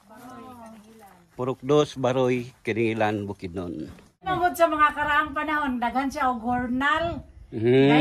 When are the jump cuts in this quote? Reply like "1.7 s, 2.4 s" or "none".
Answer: 4.3 s

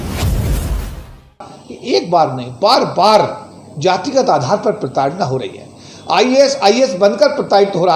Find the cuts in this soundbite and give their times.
1.5 s

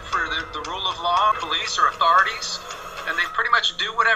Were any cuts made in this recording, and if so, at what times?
1.3 s

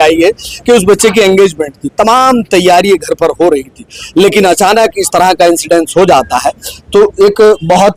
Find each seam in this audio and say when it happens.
none

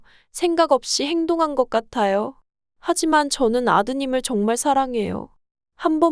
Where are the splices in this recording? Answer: none

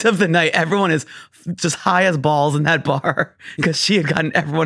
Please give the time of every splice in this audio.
none

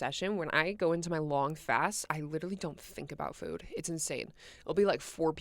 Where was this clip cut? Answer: none

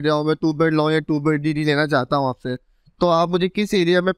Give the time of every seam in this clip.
none

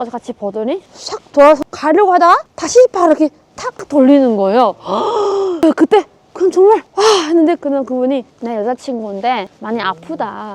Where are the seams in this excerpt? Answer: 8.3 s

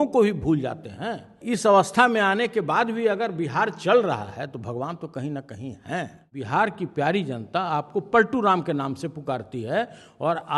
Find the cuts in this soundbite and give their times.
1.4 s, 6.3 s

